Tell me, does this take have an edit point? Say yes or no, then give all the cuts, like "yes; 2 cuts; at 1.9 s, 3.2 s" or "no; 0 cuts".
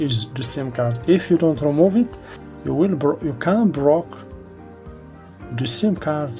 no; 0 cuts